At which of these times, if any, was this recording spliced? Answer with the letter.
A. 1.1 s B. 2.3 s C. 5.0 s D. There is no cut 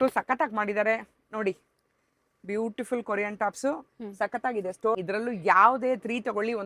C